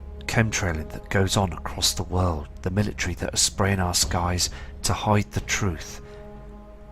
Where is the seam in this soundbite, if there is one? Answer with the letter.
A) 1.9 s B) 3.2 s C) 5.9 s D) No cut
B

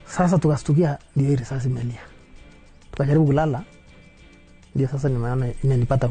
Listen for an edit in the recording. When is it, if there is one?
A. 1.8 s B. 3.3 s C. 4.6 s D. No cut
D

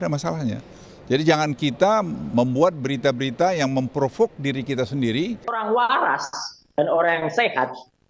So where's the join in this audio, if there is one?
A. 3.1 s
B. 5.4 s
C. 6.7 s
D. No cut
B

